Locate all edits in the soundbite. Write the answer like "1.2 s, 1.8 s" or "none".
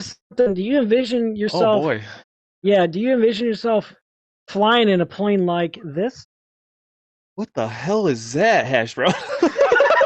none